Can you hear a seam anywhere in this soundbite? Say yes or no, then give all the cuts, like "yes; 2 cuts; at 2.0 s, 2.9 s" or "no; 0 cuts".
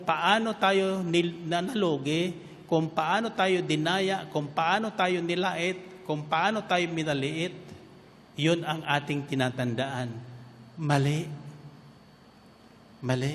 no; 0 cuts